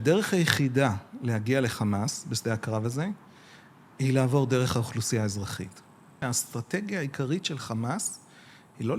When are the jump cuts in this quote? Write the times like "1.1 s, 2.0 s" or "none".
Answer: 6.2 s